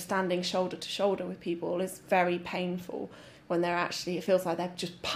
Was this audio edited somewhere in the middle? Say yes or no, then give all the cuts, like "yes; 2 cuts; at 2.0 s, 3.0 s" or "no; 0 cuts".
no; 0 cuts